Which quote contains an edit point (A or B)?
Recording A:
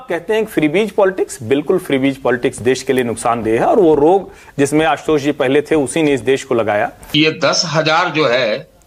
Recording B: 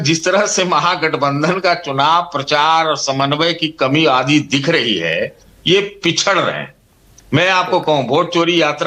A